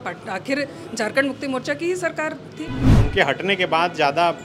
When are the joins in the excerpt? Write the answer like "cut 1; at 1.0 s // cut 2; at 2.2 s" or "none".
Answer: cut 1; at 2.9 s